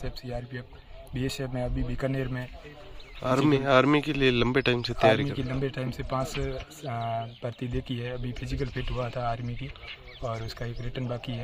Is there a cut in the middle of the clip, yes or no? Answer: no